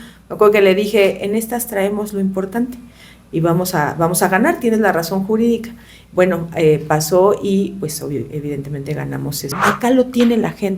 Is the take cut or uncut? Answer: cut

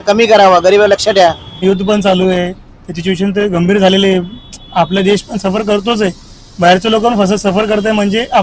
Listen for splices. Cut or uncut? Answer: cut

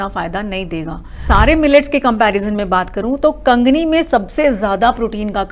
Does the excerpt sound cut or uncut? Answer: cut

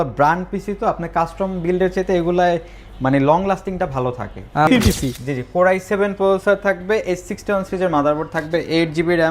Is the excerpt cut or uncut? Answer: cut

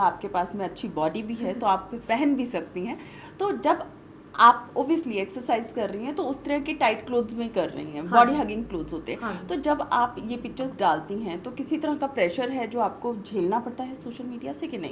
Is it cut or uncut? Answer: uncut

